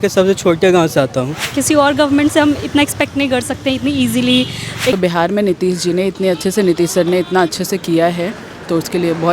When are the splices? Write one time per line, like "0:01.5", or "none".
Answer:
0:01.5
0:05.0